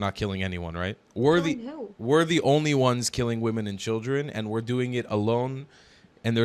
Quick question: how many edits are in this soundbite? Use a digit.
1